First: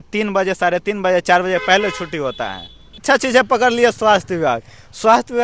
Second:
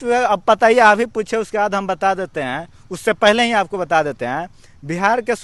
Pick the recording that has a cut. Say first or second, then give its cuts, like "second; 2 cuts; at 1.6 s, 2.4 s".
first; 1 cut; at 3.0 s